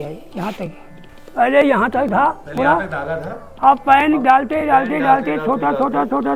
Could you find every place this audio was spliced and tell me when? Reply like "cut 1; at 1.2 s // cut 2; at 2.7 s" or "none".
none